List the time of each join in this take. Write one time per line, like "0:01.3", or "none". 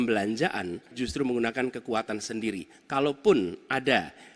0:01.0